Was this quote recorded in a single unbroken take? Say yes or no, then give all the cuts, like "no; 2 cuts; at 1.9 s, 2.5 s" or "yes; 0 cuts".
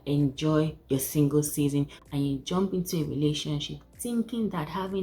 no; 1 cut; at 2.0 s